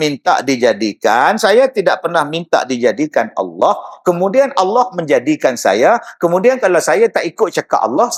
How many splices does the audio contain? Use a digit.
0